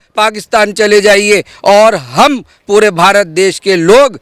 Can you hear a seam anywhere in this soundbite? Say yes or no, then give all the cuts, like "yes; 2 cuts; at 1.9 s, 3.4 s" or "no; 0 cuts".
no; 0 cuts